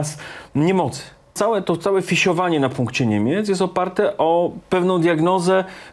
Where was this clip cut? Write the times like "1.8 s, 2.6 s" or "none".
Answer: 1.3 s